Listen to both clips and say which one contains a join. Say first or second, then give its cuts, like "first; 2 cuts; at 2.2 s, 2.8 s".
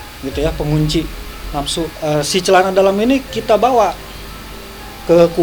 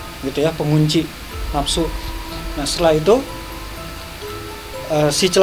first; 1 cut; at 1.9 s